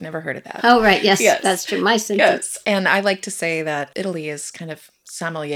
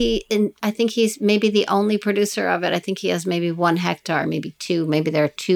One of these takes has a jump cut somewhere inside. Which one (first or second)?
first